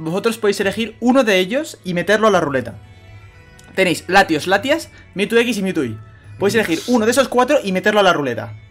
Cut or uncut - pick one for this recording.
uncut